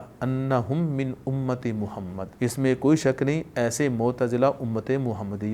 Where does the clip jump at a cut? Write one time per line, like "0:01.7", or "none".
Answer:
0:02.2